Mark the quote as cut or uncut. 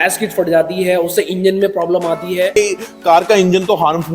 cut